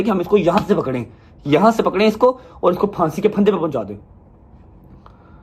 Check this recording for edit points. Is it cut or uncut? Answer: uncut